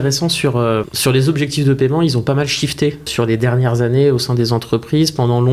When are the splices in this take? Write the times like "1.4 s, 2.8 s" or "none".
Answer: 0.9 s, 3.1 s